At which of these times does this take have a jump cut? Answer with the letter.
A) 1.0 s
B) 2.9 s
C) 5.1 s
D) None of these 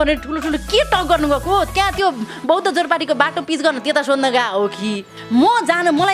C